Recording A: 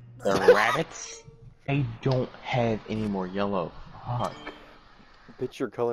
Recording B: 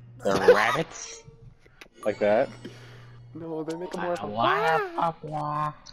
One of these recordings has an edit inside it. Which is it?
A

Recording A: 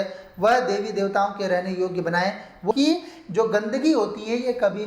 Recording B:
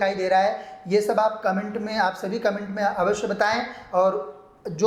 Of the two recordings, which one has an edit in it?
A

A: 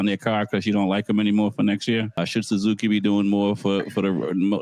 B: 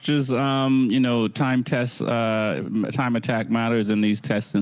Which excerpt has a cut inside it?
A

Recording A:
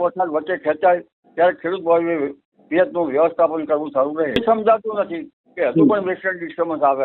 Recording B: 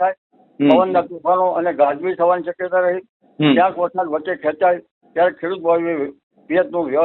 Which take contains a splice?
A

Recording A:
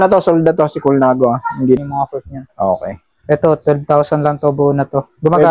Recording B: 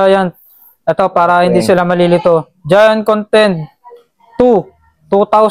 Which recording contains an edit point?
A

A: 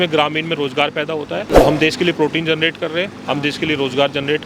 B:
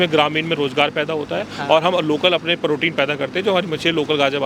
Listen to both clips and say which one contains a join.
A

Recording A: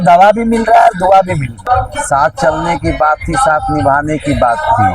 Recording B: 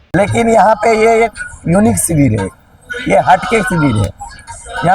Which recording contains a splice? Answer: A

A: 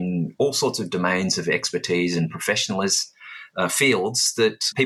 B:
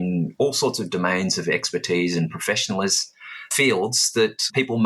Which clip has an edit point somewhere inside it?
B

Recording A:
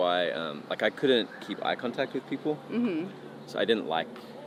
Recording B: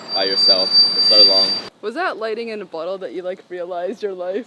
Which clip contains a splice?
B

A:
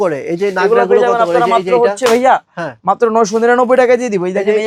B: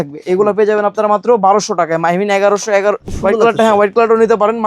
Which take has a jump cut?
B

